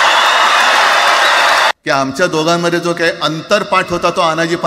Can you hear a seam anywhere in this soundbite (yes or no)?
yes